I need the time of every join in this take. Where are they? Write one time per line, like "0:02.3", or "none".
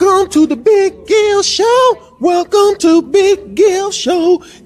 none